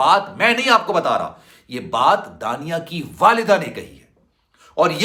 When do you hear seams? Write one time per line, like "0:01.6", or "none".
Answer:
none